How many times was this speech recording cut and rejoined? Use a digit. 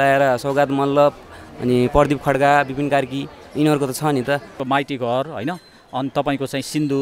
1